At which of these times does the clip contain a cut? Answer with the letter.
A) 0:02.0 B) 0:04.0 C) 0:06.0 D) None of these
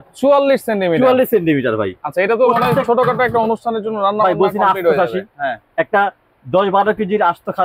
D